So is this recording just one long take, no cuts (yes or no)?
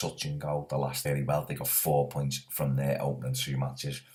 yes